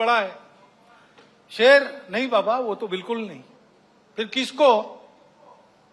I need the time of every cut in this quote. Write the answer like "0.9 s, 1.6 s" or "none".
none